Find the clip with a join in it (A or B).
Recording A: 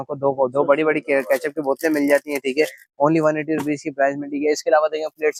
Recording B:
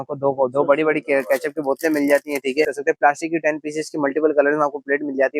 B